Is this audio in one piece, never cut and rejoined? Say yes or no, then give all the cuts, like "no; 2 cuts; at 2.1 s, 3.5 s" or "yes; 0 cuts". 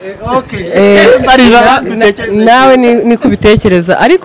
yes; 0 cuts